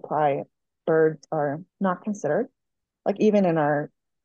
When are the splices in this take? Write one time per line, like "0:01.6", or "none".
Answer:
0:01.7